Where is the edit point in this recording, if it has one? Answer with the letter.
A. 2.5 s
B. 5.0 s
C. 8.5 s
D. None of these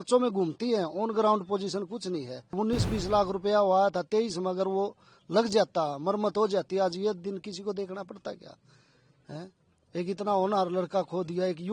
A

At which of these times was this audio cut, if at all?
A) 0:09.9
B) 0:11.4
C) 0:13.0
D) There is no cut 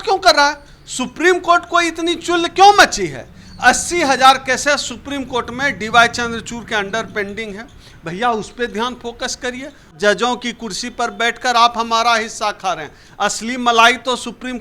A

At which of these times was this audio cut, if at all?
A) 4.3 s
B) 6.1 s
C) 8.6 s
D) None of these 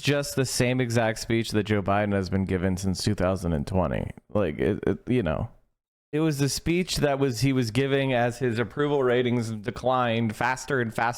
D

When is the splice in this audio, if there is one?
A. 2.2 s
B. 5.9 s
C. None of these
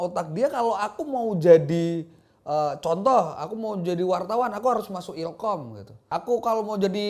B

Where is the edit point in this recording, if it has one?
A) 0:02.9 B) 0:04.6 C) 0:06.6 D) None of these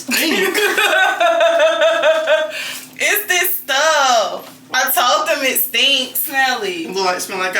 B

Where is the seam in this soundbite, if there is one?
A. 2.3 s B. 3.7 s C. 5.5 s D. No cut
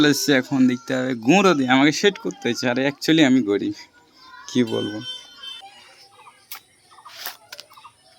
C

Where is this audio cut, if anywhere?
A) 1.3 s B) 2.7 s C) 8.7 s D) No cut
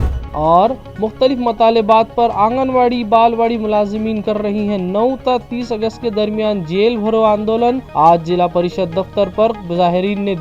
D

